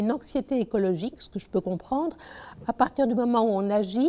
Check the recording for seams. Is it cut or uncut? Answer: uncut